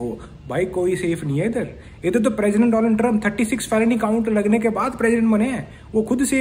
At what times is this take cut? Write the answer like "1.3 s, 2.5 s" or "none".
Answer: none